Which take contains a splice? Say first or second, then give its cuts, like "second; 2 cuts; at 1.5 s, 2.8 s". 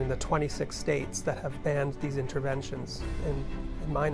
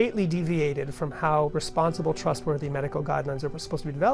first; 1 cut; at 3.2 s